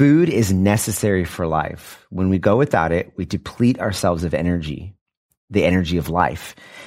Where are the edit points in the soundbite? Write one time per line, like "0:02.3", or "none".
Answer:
none

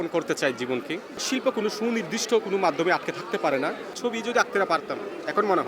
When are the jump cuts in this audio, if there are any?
0:01.2
0:03.9

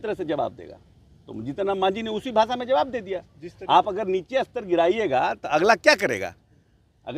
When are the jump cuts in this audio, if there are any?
none

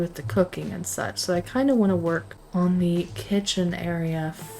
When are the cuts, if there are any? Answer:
0:02.4

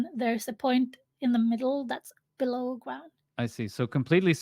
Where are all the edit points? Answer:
0:03.2

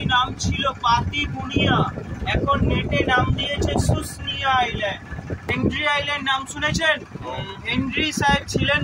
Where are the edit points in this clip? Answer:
0:05.5

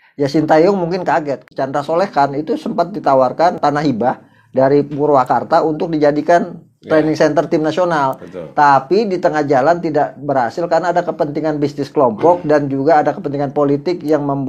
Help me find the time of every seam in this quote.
0:01.4
0:03.6

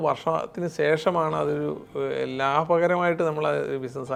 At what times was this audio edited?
none

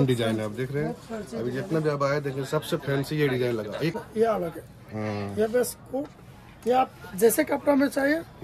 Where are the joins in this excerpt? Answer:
0:03.9

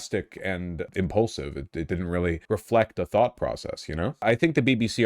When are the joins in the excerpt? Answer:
0:00.9
0:02.4
0:04.2

